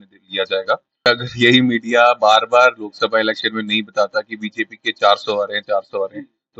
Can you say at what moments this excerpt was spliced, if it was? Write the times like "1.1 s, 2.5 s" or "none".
1.1 s